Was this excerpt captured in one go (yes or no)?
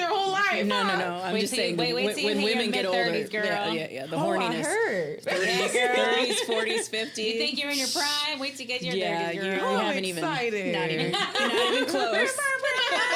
yes